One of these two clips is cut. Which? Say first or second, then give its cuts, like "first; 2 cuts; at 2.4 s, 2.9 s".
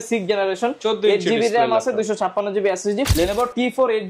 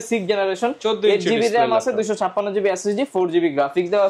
first; 1 cut; at 3.1 s